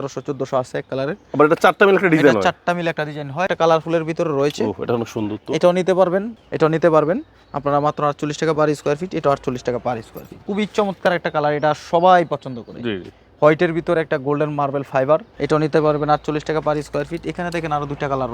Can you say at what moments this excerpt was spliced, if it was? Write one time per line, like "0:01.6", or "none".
0:03.5
0:06.3
0:10.4
0:15.3